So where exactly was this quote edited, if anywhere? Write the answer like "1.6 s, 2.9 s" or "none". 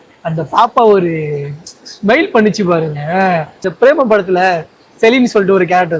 3.7 s